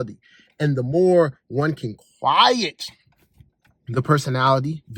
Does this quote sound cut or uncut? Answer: uncut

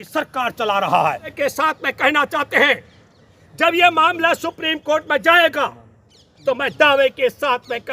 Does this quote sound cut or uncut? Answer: cut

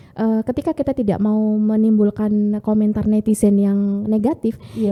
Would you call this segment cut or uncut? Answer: uncut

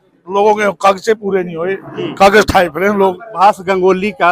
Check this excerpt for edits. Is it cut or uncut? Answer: cut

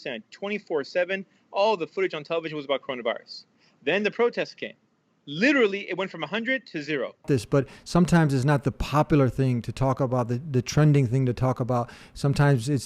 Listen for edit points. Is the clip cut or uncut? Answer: cut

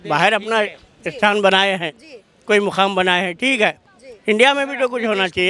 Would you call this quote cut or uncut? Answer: uncut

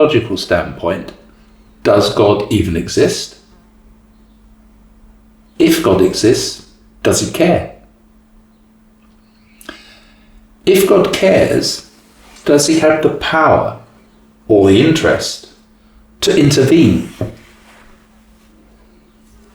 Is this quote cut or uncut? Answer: uncut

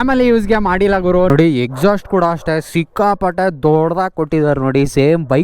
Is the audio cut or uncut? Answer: cut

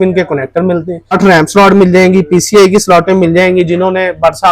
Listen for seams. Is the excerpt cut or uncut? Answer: cut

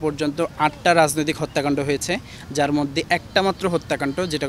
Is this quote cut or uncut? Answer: uncut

